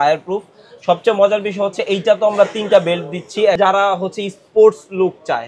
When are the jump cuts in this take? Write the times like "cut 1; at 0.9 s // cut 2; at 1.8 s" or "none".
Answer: cut 1; at 3.6 s